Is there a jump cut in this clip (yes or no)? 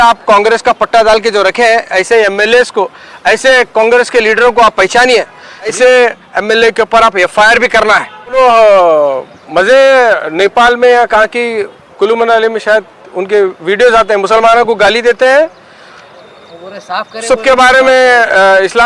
yes